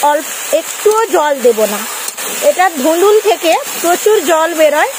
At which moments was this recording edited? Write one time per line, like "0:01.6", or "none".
none